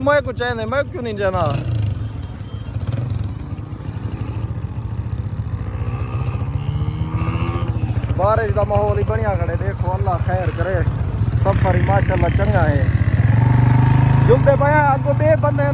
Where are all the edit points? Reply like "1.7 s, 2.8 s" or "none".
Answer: none